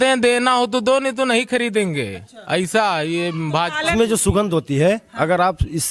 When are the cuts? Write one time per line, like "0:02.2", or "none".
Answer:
0:03.9